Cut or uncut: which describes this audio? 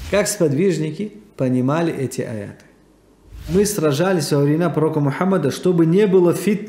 cut